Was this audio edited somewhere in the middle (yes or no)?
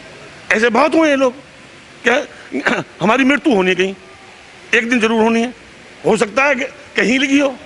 yes